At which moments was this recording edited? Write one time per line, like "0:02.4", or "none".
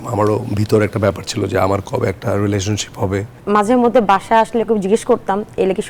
0:03.3